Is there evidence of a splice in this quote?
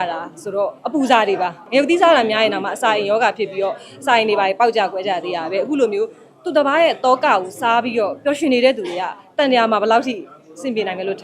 yes; 1 cut; at 1.6 s

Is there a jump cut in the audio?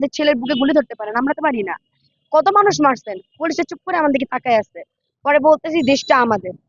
no; 0 cuts

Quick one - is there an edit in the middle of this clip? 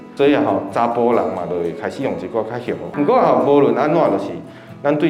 yes; 1 cut; at 2.9 s

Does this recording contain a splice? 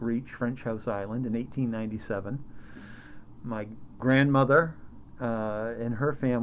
yes; 1 cut; at 3.9 s

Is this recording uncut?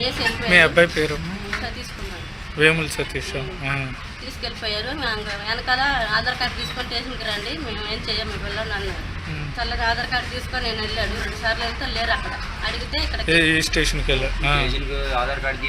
yes; 0 cuts

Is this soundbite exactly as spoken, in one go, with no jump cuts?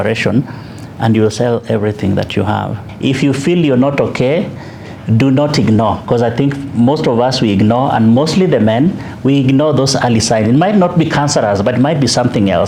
no; 1 cut; at 2.8 s

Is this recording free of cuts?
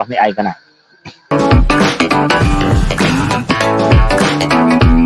no; 1 cut; at 1.3 s

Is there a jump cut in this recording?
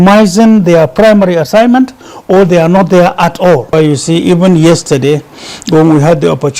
yes; 1 cut; at 3.7 s

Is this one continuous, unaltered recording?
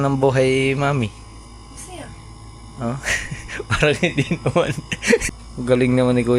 no; 1 cut; at 5.2 s

